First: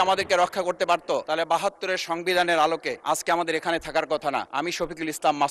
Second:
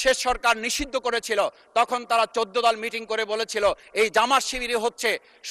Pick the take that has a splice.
first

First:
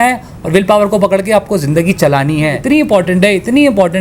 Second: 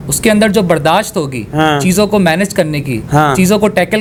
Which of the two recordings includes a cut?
first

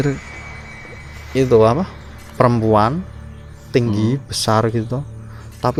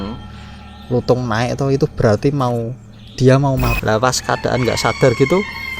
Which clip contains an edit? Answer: second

